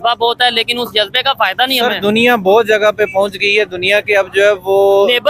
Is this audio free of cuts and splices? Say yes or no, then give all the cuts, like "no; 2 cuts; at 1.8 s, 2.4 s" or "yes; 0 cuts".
yes; 0 cuts